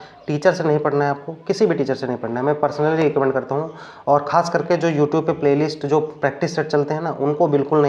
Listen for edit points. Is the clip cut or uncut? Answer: uncut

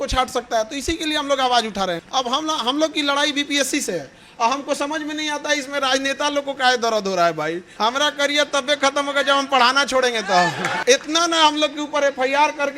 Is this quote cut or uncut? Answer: cut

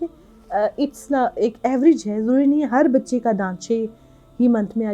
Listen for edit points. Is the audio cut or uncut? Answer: uncut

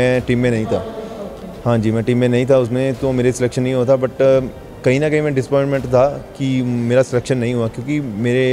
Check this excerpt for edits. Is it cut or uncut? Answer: uncut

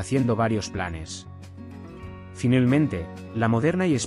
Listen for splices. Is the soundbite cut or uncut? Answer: cut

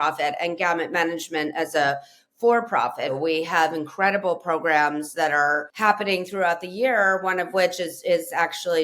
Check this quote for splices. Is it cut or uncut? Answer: cut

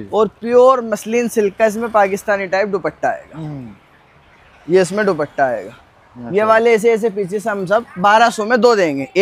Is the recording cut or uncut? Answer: uncut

